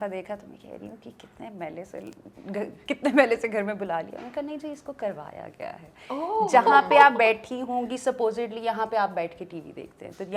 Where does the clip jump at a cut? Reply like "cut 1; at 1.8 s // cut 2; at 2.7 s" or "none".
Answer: none